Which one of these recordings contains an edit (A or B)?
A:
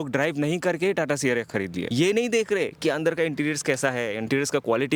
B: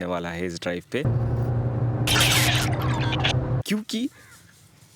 B